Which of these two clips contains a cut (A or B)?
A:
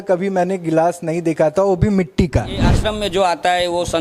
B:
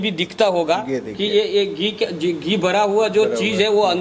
A